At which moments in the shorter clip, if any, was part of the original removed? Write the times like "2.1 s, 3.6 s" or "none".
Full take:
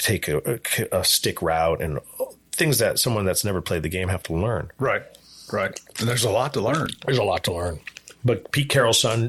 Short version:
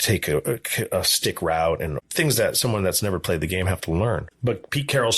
2.0 s, 4.3 s